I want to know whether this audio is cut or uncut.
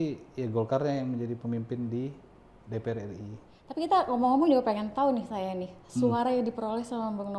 cut